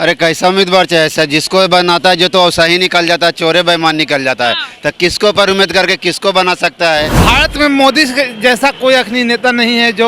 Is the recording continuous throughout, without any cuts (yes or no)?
no